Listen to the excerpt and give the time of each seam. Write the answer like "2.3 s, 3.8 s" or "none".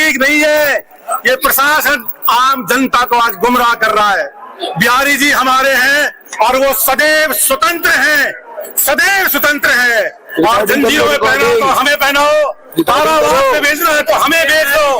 9.0 s